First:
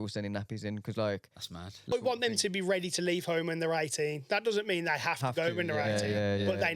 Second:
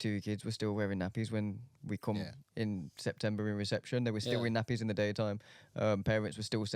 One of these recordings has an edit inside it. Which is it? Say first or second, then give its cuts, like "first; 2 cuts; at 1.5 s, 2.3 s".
first; 1 cut; at 1.9 s